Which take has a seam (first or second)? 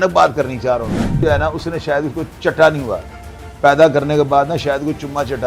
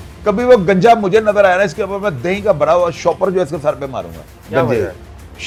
first